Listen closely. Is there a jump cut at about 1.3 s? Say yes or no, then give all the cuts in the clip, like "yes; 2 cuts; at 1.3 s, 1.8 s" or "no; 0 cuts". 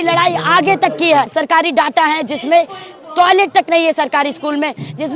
yes; 1 cut; at 1.3 s